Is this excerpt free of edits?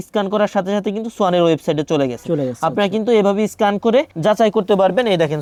yes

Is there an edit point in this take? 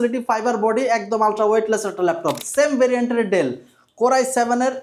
yes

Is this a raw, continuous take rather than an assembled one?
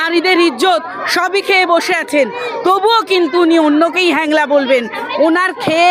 yes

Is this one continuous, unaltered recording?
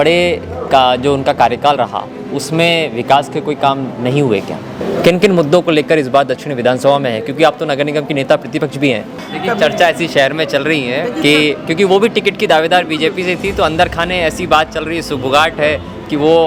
no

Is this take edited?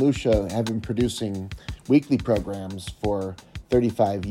no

